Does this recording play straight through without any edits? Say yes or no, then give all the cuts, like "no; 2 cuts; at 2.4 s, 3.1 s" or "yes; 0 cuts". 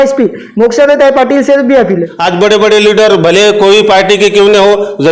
no; 1 cut; at 2.1 s